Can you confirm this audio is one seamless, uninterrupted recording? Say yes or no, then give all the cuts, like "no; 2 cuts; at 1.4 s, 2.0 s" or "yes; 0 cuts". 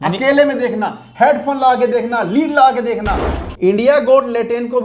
no; 1 cut; at 3.4 s